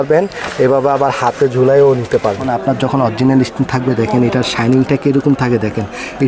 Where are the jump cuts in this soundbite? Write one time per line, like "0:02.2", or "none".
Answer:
0:02.5